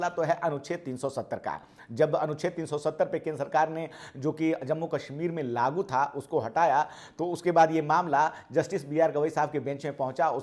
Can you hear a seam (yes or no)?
no